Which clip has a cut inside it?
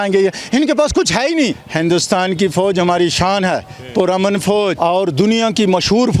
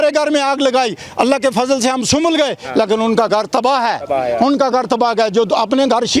first; 2 cuts; at 1.6 s, 4.8 s

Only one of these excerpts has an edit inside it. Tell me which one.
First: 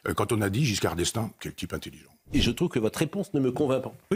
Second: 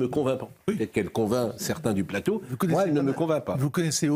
first; 1 cut; at 2.3 s

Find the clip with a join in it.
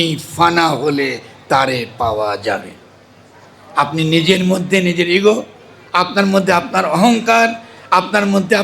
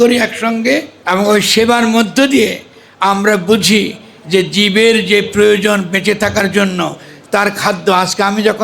second; 1 cut; at 0.9 s

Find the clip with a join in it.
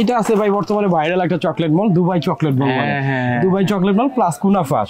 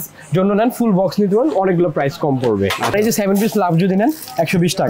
second; 1 cut; at 2.9 s

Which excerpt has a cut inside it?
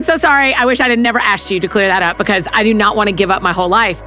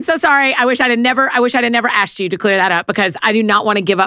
first; 1 cut; at 1.1 s

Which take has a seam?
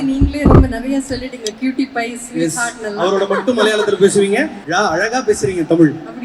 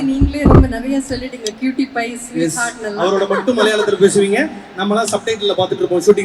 first; 1 cut; at 4.6 s

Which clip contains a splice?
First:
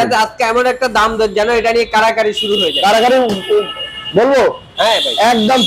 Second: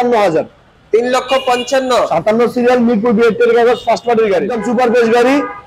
second; 1 cut; at 4.6 s

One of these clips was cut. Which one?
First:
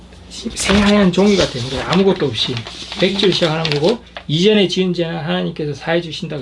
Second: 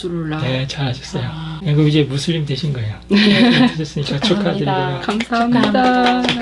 second; 1 cut; at 1.5 s

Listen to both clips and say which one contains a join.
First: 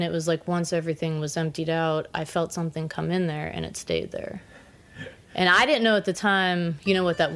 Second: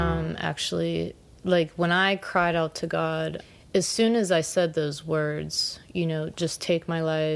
second; 1 cut; at 3.4 s

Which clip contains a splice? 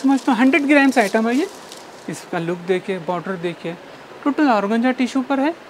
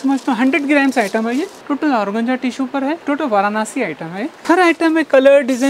second; 3 cuts; at 1.6 s, 3.0 s, 4.4 s

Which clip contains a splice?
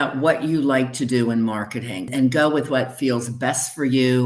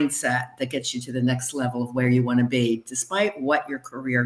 first; 1 cut; at 2.1 s

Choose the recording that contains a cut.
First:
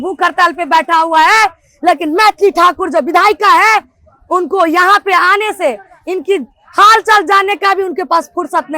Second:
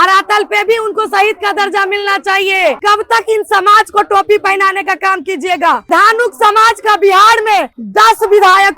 second; 3 cuts; at 2.8 s, 5.9 s, 7.8 s

